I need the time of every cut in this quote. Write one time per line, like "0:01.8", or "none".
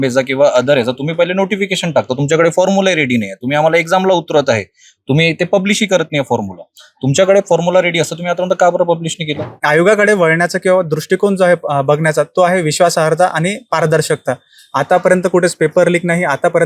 0:09.5